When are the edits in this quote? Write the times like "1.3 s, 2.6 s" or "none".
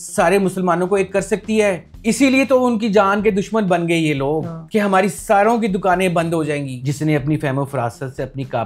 1.9 s, 4.5 s, 6.7 s